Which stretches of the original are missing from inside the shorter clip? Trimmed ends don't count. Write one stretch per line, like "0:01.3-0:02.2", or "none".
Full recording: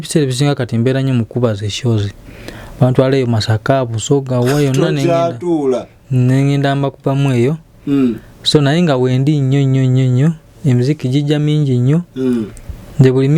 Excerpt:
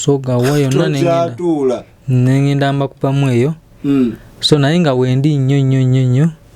none